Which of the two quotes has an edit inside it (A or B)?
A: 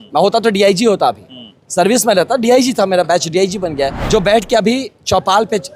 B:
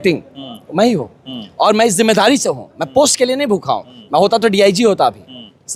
A